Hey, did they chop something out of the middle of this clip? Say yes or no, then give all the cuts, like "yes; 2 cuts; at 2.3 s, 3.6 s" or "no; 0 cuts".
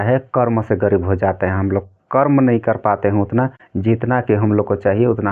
no; 0 cuts